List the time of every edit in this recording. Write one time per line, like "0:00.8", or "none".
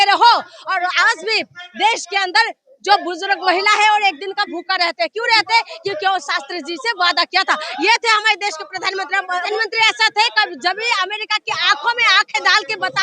0:09.5